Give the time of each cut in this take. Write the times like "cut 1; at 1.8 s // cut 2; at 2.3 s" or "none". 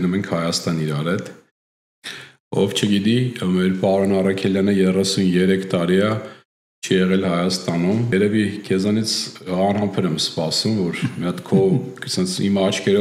cut 1; at 8.1 s